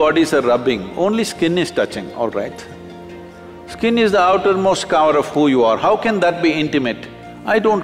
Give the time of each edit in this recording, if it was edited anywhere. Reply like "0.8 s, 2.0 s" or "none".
none